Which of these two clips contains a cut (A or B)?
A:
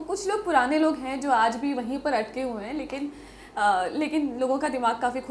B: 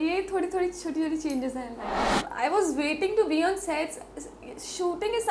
B